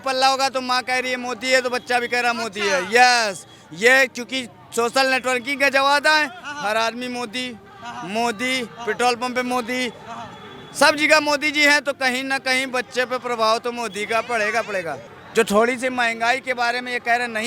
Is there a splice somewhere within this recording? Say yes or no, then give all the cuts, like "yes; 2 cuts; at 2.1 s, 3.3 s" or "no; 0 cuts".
no; 0 cuts